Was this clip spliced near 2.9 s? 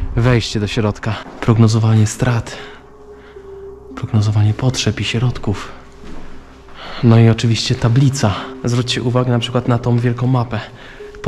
no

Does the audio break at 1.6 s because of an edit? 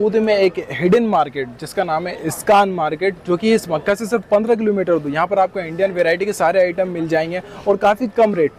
no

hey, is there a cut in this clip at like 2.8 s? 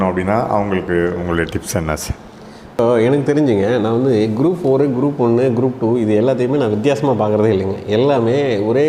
yes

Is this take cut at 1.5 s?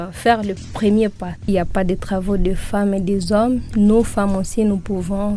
yes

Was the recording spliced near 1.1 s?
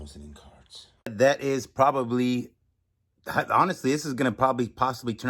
yes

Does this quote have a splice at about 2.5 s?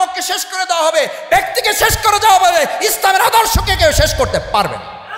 no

